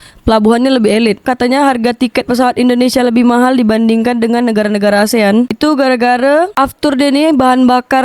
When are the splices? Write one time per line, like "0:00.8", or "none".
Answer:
0:01.2